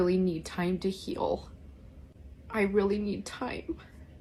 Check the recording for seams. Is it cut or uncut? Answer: uncut